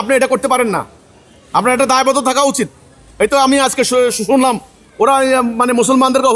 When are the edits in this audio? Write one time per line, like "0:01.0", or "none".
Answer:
none